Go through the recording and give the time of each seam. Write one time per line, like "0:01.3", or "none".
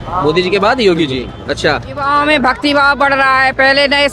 0:02.0